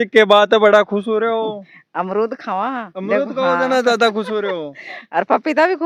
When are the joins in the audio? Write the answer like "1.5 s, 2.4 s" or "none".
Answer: none